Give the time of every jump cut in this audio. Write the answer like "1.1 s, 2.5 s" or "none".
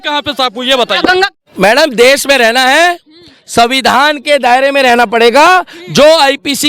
1.3 s